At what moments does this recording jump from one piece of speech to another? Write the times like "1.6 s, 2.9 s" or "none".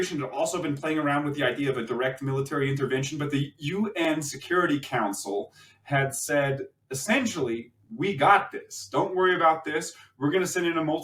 none